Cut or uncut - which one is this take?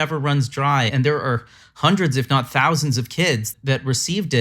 cut